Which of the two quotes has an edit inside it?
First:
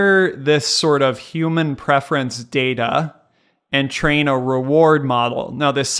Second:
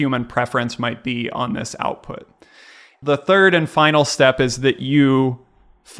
second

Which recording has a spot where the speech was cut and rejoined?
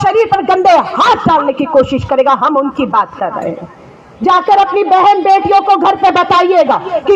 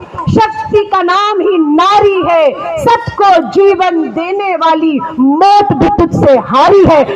first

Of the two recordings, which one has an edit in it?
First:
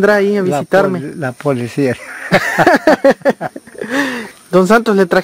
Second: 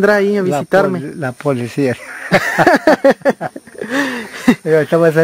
first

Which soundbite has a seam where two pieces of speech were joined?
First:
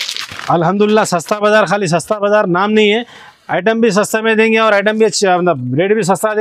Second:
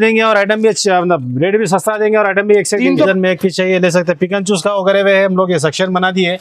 second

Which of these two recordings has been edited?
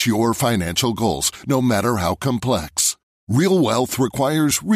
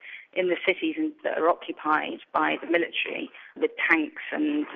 second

